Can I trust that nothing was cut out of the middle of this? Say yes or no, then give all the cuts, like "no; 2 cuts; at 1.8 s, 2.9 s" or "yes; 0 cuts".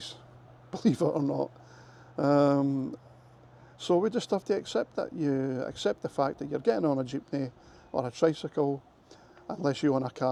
yes; 0 cuts